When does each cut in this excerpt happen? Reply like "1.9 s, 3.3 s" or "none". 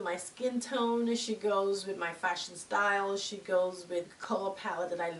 4.1 s